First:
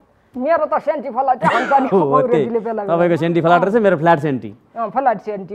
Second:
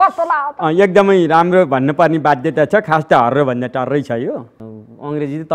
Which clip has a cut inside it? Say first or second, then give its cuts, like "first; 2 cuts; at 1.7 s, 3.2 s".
second; 1 cut; at 4.5 s